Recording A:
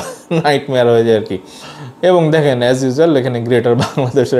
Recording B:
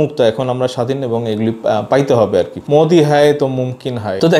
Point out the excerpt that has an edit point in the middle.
B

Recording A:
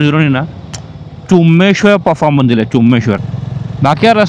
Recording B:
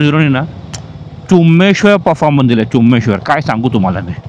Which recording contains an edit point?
A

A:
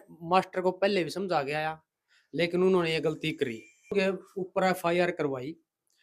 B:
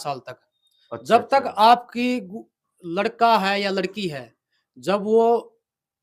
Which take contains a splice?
A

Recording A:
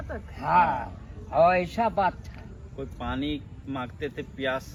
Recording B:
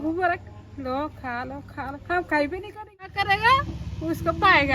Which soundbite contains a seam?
B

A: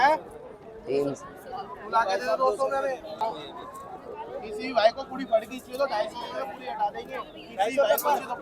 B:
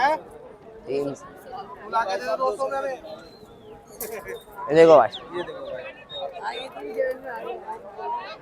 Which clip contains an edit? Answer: A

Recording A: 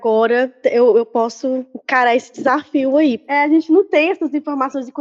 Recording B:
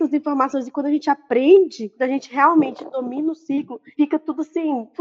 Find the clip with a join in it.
A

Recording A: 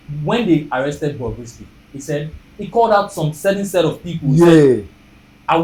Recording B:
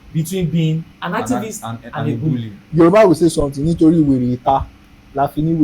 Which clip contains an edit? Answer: B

